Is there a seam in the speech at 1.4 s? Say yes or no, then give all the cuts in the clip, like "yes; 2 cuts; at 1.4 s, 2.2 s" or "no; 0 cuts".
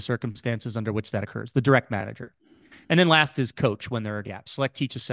no; 0 cuts